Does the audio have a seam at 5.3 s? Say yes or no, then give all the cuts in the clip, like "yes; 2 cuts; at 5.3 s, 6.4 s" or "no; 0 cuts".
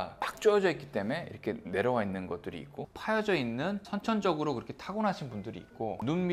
no; 1 cut; at 2.9 s